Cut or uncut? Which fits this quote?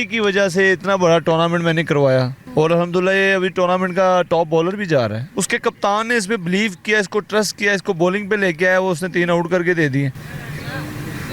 cut